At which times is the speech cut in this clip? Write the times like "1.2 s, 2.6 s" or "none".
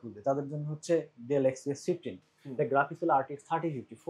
none